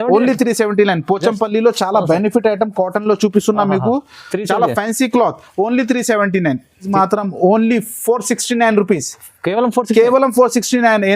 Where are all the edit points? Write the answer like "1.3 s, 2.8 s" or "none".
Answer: 6.9 s